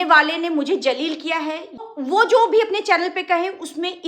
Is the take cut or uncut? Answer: cut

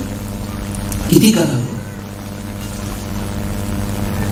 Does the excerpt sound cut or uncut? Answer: uncut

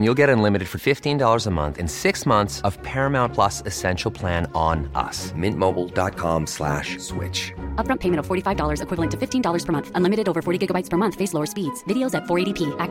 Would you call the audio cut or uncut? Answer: uncut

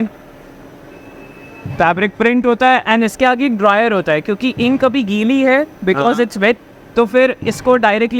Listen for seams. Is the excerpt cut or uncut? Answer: uncut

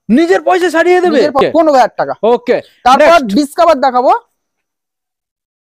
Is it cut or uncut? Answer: cut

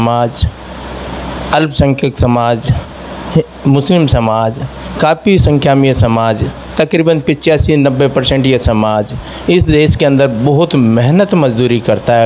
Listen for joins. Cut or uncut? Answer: uncut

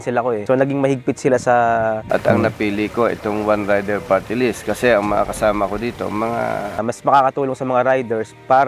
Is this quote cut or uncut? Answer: cut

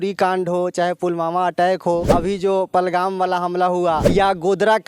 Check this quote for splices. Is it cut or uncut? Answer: cut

